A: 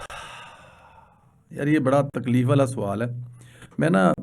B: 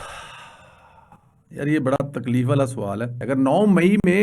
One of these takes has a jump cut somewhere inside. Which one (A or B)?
B